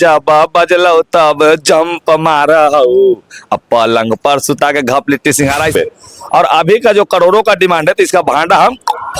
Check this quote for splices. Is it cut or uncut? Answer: cut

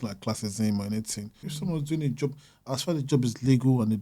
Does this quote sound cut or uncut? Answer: cut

